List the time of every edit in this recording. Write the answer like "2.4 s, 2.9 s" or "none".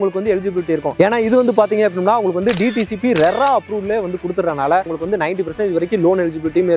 4.9 s